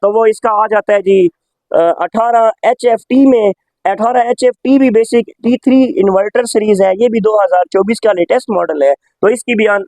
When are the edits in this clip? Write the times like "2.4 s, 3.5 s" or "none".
none